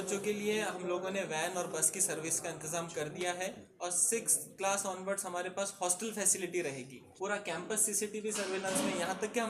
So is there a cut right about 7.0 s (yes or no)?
yes